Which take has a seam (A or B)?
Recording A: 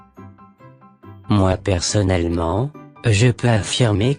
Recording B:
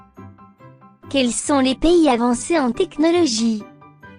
A